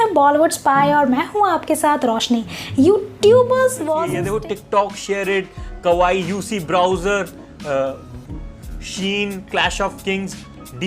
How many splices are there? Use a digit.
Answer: 1